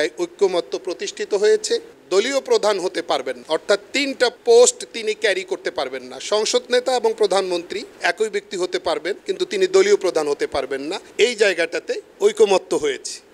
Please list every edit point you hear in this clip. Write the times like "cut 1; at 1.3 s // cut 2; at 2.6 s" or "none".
none